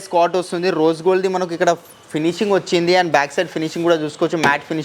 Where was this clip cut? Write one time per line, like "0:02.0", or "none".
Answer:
none